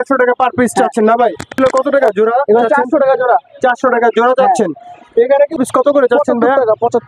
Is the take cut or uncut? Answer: cut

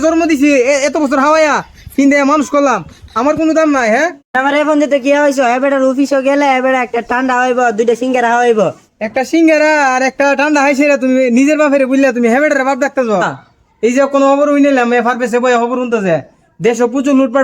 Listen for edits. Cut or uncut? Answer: cut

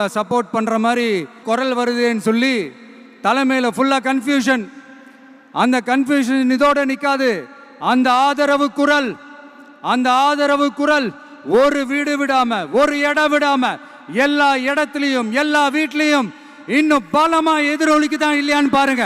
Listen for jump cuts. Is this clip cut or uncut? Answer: cut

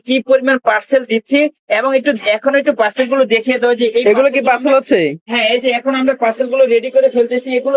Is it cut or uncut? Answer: uncut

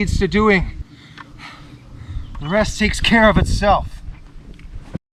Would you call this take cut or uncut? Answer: uncut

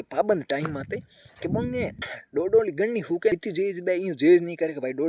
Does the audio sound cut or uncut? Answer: cut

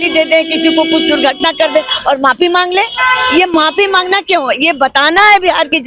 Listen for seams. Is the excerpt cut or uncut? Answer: uncut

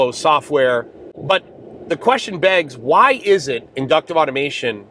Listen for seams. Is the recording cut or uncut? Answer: cut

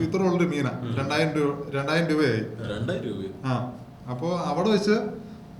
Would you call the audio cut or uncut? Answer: uncut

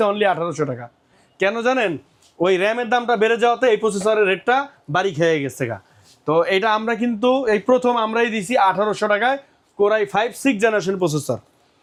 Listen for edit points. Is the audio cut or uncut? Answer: uncut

